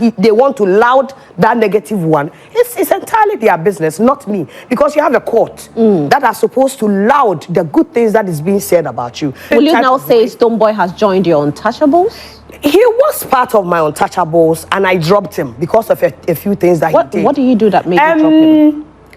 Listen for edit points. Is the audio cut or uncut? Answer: cut